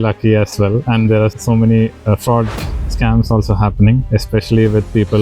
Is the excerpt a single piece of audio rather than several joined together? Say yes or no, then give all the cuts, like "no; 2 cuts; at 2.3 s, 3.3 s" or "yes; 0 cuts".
no; 2 cuts; at 1.4 s, 4.0 s